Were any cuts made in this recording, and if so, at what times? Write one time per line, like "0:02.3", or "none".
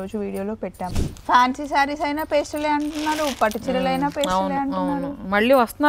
0:00.9